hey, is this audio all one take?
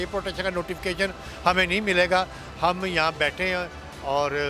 yes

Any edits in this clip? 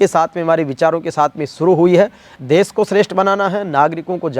yes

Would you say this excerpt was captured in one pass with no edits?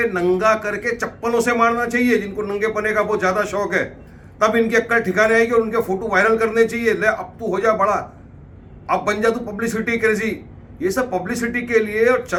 yes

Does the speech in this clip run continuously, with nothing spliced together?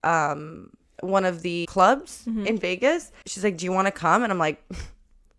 no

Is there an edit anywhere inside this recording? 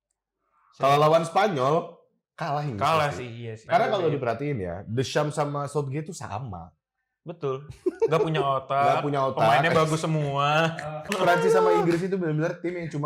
yes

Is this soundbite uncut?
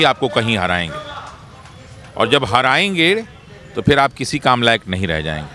yes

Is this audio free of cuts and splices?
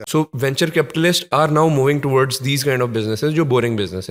yes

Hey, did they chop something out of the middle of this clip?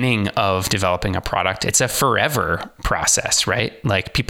yes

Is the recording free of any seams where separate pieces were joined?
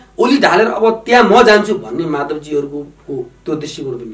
no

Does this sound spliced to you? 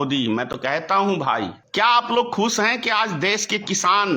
yes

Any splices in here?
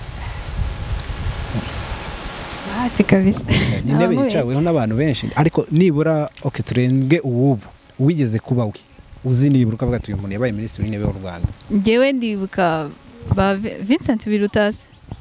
no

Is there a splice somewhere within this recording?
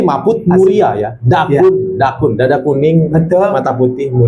no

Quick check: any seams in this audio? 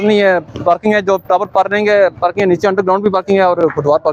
no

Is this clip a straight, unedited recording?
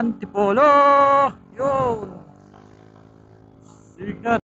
yes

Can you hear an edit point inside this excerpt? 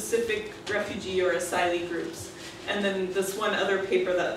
no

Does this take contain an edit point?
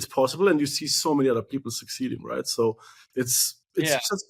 no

